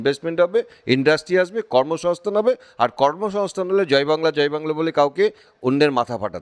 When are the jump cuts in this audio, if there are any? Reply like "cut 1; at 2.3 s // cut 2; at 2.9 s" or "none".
none